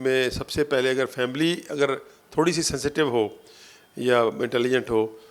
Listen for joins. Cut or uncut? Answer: uncut